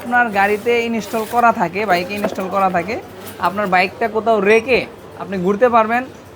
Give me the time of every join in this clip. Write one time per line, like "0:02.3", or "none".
none